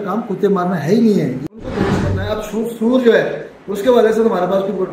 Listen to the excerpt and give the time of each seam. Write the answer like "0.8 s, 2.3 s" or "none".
1.9 s

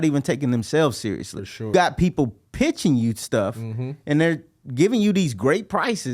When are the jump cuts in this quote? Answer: 1.7 s

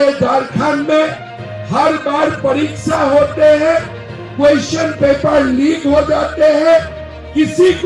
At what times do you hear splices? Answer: none

